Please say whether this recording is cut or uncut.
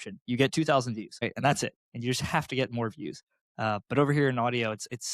cut